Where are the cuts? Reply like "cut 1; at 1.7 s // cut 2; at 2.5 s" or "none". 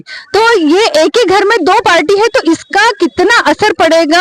none